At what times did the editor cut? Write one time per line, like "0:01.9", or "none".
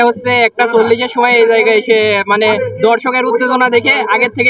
none